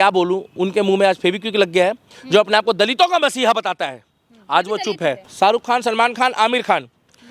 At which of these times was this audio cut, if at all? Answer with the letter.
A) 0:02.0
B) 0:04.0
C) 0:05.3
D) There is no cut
C